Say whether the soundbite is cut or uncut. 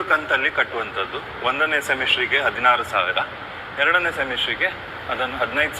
uncut